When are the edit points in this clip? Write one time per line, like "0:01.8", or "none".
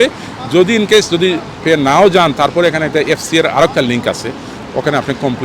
none